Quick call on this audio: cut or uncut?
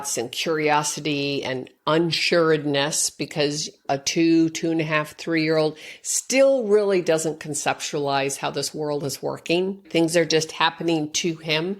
cut